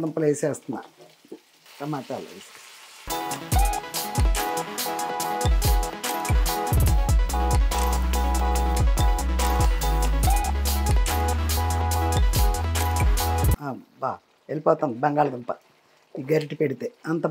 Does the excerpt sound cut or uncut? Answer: cut